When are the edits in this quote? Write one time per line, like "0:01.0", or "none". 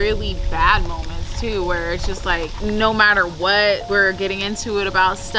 0:02.5
0:03.8